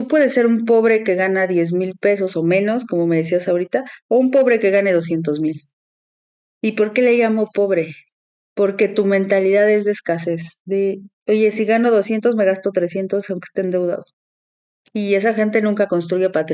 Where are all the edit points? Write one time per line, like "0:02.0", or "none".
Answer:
none